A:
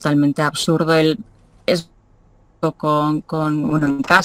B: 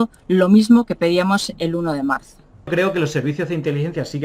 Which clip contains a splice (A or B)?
B